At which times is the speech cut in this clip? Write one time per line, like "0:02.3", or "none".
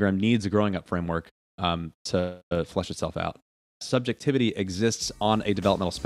0:03.8